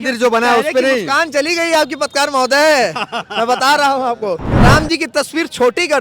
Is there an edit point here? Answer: yes; 1 cut; at 4.5 s

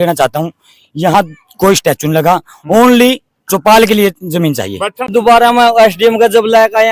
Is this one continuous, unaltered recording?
no; 1 cut; at 5.1 s

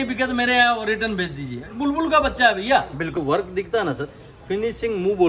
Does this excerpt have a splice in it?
yes; 1 cut; at 3.2 s

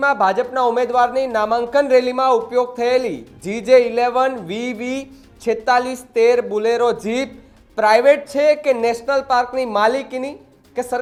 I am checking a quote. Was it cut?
no; 0 cuts

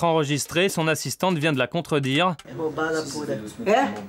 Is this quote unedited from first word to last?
no; 1 cut; at 2.5 s

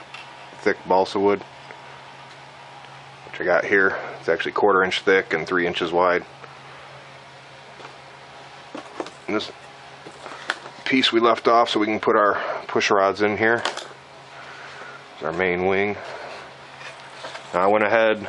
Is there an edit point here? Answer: yes; 1 cut; at 7.7 s

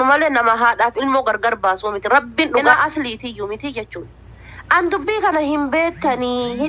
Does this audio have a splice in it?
yes; 1 cut; at 2.7 s

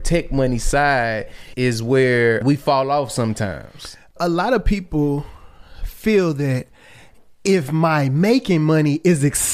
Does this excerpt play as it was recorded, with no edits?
no; 3 cuts; at 1.4 s, 2.4 s, 4.1 s

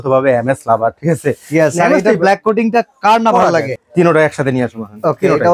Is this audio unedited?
no; 1 cut; at 3.7 s

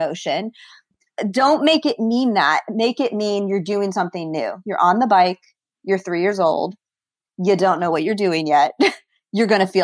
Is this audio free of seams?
yes; 0 cuts

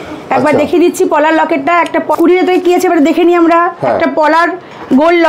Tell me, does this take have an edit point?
yes; 1 cut; at 2.1 s

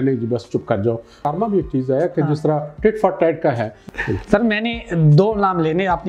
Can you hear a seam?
yes; 2 cuts; at 1.2 s, 3.8 s

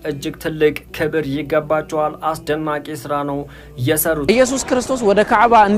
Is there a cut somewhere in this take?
yes; 1 cut; at 4.3 s

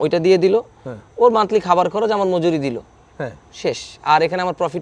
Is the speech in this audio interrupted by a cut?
no; 0 cuts

